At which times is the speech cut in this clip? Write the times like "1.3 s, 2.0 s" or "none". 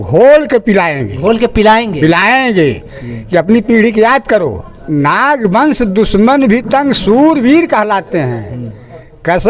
4.7 s

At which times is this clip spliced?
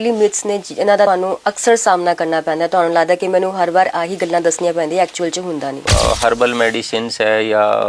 1.1 s, 5.8 s

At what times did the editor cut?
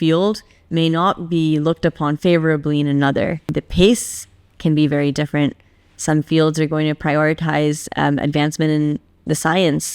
2.2 s, 3.6 s

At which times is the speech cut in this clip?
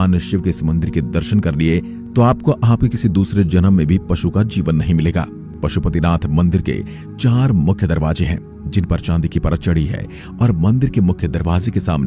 none

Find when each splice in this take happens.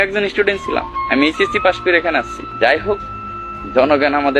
2.4 s

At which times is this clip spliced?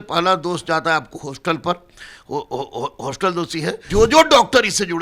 3.8 s

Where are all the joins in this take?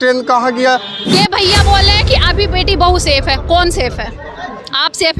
1.0 s

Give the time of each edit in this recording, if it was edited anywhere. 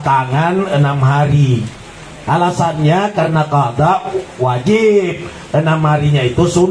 none

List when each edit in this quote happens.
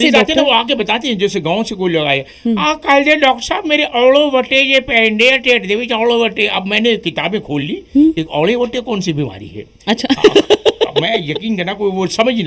none

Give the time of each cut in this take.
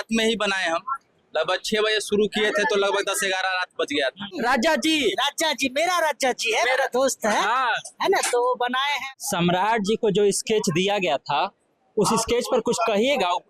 4.4 s, 9.0 s

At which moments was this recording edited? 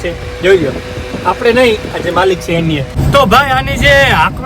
2.9 s

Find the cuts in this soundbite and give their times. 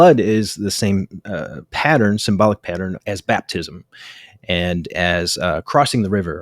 3.0 s

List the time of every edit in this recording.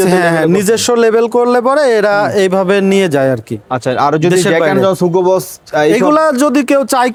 none

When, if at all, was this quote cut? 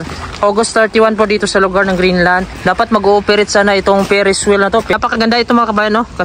2.5 s, 4.9 s

